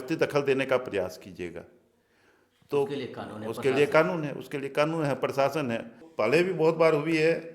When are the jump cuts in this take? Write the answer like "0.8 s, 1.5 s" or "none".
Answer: 6.0 s